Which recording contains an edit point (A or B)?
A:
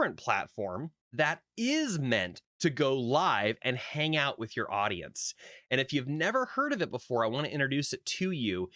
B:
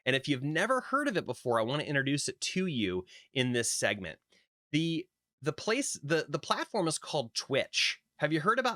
A